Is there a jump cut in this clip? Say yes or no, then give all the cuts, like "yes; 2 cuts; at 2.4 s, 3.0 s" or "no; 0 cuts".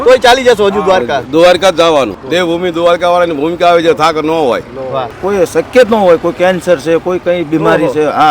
yes; 2 cuts; at 2.2 s, 5.1 s